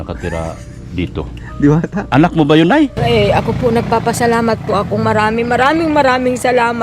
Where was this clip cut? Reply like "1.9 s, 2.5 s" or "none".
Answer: 3.0 s